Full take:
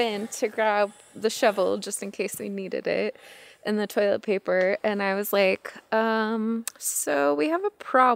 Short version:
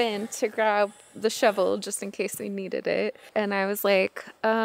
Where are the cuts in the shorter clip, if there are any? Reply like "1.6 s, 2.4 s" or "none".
3.3 s